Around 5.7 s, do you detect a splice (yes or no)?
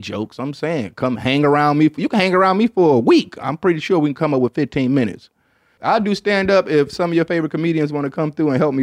yes